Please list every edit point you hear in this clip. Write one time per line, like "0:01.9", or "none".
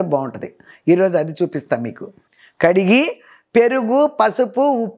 0:02.2